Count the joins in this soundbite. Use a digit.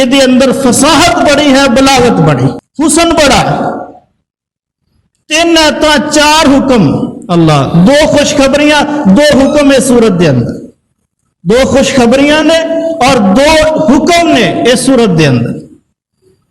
1